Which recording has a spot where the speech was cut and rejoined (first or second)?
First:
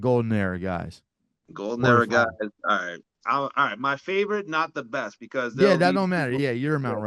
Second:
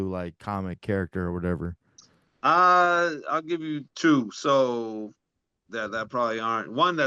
first